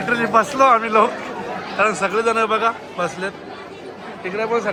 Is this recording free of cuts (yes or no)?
yes